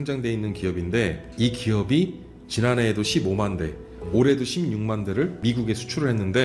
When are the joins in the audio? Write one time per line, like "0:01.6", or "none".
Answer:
0:01.2
0:05.4